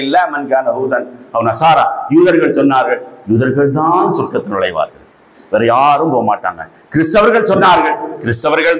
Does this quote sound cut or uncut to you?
uncut